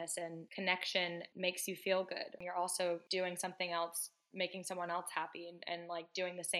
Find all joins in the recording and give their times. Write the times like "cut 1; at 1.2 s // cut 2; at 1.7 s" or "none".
cut 1; at 1.3 s // cut 2; at 2.4 s